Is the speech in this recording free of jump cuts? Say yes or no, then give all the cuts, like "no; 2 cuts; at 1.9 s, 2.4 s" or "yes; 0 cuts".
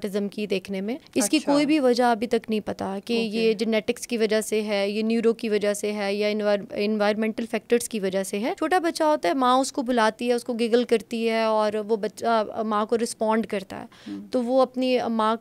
no; 2 cuts; at 1.0 s, 8.6 s